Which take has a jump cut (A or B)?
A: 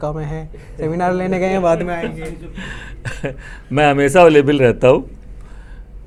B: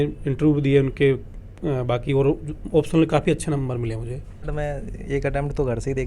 B